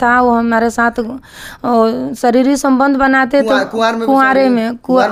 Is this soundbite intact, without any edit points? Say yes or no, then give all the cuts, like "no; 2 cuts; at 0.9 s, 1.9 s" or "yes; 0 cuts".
yes; 0 cuts